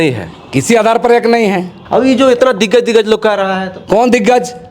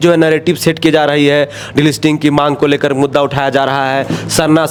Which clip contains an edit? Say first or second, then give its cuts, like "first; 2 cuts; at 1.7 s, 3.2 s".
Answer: first; 1 cut; at 1.7 s